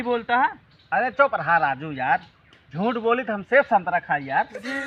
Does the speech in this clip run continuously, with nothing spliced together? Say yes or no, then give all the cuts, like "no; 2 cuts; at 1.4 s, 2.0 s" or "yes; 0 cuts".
yes; 0 cuts